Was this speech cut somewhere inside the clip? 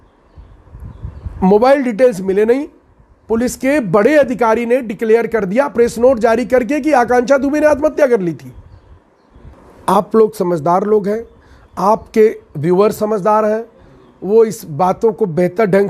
yes; 1 cut; at 9.5 s

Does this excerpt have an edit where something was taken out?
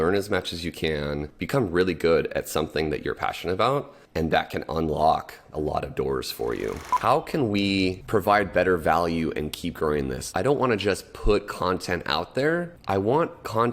yes; 7 cuts; at 1.3 s, 4.0 s, 5.5 s, 6.9 s, 8.0 s, 10.2 s, 12.7 s

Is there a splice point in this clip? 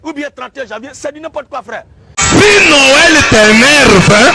yes; 1 cut; at 2.2 s

